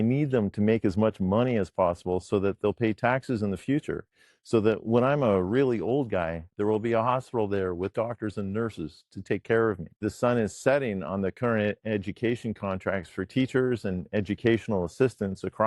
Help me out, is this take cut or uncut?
cut